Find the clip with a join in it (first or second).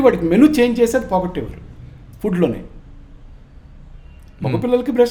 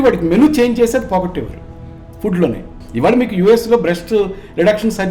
second